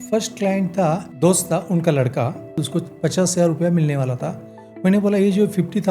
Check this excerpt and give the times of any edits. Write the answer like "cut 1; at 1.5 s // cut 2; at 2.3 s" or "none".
cut 1; at 2.5 s